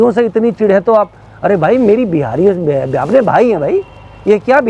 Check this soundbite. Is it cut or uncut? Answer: uncut